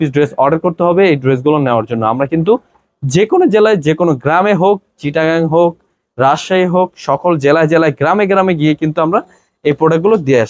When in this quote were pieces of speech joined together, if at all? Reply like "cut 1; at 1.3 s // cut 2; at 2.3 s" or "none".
none